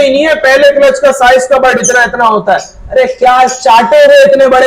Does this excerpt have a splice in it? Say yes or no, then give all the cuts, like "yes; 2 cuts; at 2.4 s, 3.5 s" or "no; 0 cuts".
no; 0 cuts